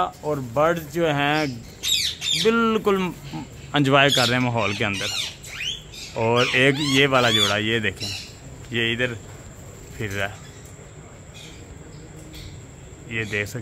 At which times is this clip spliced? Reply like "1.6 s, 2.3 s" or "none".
none